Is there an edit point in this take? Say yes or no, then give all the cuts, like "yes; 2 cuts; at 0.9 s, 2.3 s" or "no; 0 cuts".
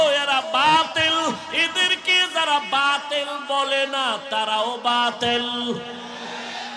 no; 0 cuts